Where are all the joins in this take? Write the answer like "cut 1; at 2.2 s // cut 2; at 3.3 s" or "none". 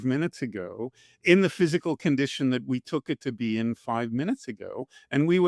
none